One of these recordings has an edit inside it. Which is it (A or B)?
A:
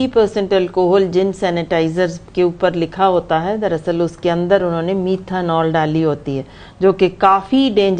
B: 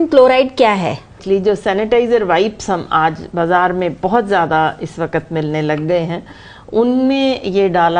B